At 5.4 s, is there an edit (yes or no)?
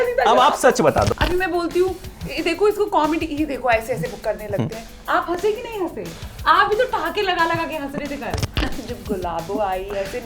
no